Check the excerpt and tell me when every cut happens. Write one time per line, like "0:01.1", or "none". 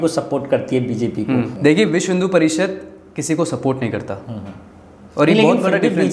0:01.5

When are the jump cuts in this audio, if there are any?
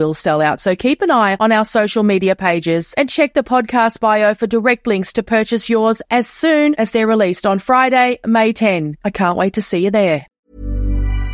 0:10.4

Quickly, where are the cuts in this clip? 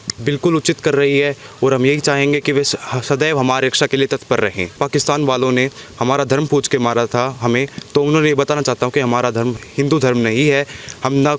0:04.8
0:09.6

